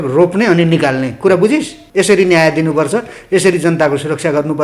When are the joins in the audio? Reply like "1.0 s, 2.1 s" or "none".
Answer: 1.8 s